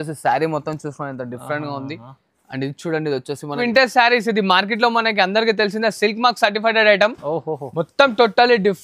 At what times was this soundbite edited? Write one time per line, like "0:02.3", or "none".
0:03.6